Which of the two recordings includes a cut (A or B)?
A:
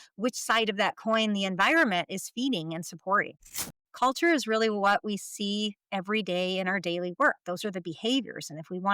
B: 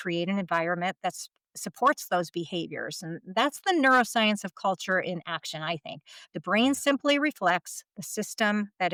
A